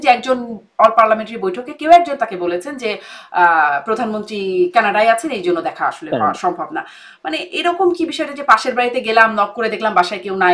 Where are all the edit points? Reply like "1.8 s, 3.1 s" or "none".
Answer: none